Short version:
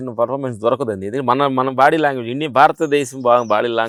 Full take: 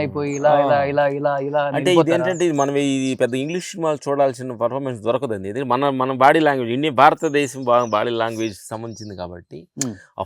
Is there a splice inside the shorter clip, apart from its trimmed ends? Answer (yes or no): no